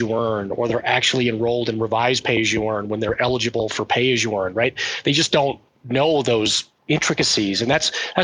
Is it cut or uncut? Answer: cut